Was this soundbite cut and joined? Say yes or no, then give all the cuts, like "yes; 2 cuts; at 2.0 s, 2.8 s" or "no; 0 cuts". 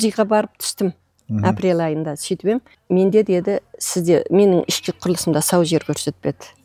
no; 0 cuts